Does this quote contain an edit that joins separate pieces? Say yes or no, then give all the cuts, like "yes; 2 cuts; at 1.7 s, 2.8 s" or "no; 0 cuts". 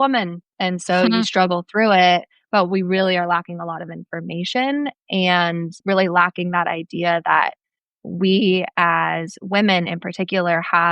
yes; 1 cut; at 5.7 s